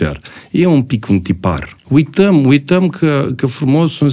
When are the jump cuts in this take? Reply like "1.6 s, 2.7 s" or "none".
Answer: 1.7 s